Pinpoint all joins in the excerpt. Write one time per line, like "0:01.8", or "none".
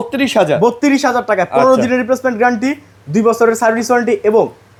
none

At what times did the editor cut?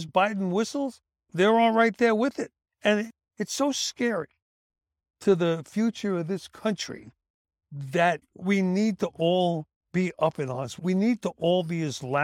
0:09.7

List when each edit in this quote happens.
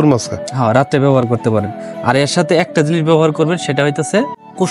none

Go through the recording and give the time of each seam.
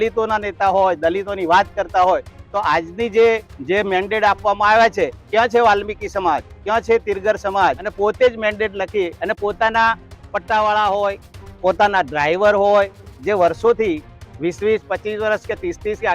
0:03.5
0:05.2
0:07.9
0:13.1

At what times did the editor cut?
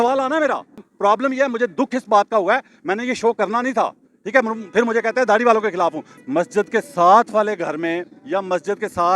0:00.9
0:06.1

